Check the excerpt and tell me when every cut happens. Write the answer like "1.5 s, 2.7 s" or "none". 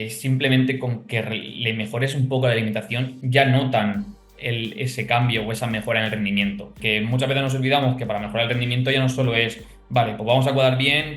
6.8 s